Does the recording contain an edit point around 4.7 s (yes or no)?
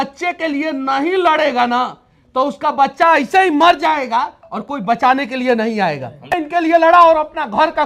no